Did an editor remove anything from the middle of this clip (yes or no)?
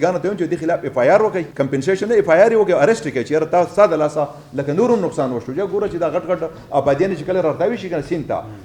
yes